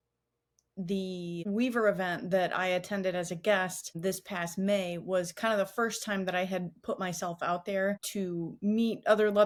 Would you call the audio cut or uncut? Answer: uncut